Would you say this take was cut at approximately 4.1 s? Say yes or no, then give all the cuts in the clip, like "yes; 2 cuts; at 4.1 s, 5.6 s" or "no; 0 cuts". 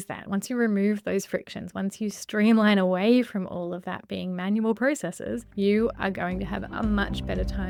no; 0 cuts